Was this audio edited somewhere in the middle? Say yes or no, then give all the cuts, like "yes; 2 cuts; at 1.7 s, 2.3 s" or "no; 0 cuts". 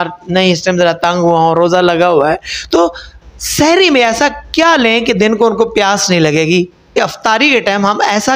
yes; 1 cut; at 6.9 s